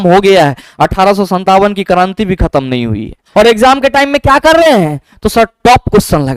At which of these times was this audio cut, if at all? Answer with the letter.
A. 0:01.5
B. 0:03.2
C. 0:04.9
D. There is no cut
B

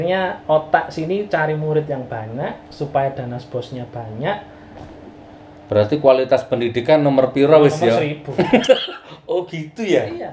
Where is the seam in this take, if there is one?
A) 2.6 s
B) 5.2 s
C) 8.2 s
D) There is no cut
D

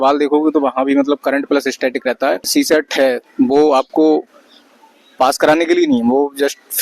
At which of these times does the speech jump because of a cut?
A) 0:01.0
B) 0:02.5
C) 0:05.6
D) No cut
B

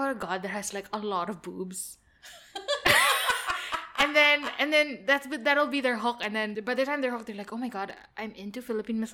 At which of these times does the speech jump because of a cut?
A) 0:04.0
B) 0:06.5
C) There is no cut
B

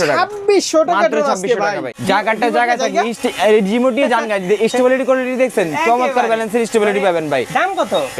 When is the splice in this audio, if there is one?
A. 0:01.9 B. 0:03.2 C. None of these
A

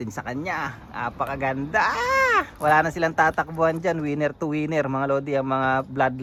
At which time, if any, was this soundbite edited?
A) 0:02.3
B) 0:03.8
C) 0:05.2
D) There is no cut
D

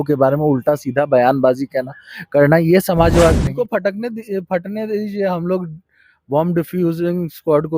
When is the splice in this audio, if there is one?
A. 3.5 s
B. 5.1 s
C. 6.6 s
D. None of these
A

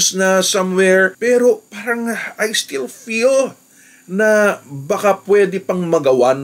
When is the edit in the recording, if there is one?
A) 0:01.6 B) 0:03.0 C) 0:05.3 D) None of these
D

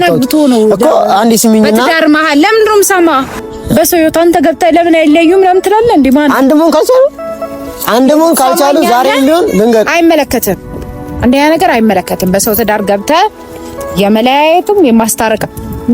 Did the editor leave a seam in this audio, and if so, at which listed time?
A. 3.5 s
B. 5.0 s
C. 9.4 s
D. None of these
A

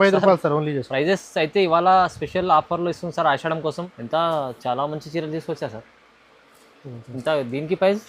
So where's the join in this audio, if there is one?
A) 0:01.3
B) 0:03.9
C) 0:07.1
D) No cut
B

